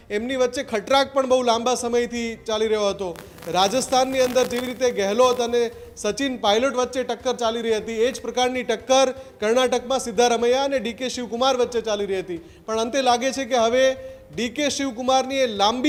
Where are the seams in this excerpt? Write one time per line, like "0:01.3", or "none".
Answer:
none